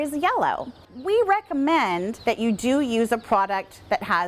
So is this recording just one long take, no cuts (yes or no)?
no